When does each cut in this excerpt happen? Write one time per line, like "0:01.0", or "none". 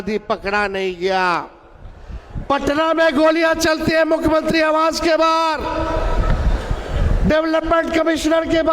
none